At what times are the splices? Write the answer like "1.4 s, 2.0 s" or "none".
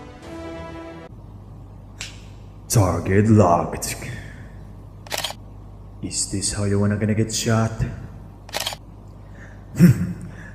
1.0 s